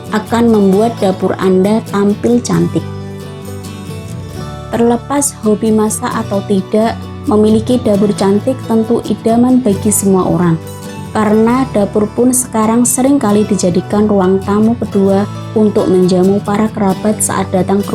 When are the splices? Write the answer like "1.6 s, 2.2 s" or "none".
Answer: 2.8 s, 4.7 s